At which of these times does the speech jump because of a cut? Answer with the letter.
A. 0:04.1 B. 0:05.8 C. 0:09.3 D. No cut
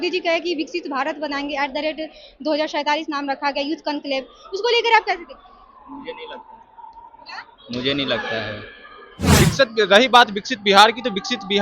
C